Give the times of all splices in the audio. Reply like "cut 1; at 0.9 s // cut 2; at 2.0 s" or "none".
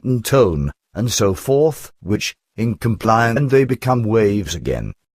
none

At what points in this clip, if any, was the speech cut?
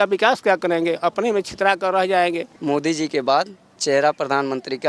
cut 1; at 2.5 s // cut 2; at 3.8 s

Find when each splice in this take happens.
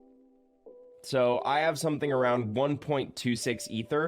cut 1; at 1.0 s

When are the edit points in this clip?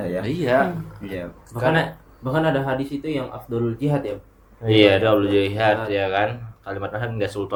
none

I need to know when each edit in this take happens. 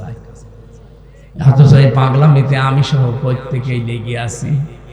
cut 1; at 1.2 s

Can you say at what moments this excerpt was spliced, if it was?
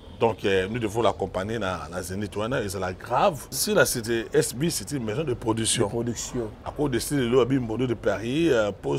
cut 1; at 3.5 s

